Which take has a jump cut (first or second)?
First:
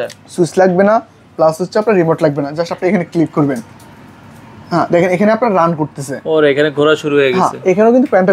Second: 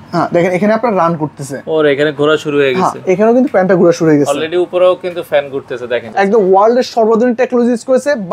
second